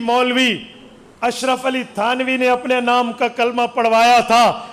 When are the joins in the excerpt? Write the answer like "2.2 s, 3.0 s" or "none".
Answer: none

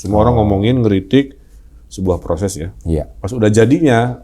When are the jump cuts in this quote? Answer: none

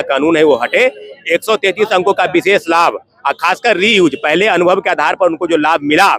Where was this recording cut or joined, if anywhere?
none

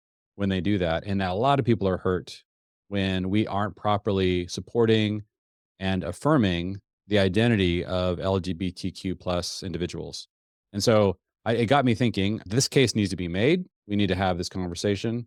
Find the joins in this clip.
none

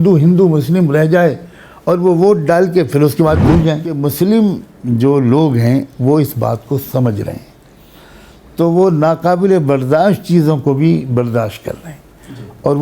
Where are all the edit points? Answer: 3.9 s

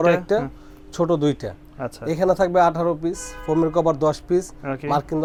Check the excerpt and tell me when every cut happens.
none

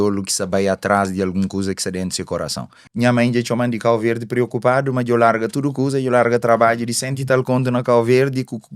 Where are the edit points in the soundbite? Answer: 2.8 s

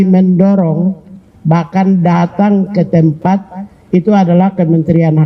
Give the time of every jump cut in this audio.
none

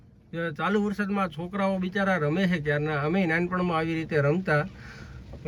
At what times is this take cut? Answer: none

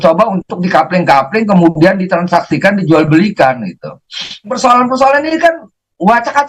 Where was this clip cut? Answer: 4.6 s

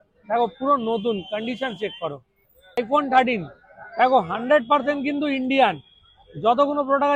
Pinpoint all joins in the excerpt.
2.8 s

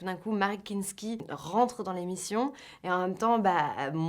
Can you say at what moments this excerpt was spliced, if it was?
none

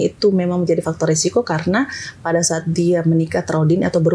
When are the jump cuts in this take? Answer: none

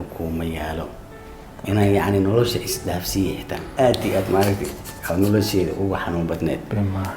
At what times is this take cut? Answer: 3.7 s

